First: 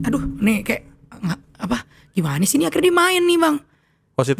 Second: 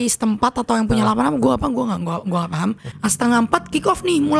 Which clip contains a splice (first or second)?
second